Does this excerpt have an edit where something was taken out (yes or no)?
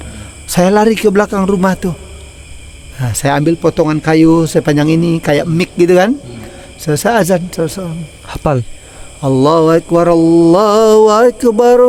no